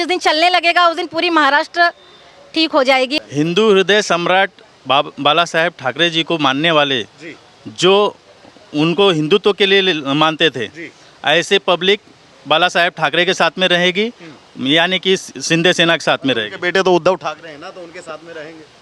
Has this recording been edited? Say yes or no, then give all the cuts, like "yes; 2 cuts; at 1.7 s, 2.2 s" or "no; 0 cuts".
yes; 1 cut; at 3.1 s